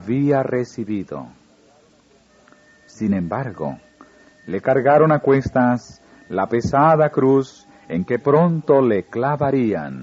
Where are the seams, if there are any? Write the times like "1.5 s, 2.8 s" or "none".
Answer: 8.2 s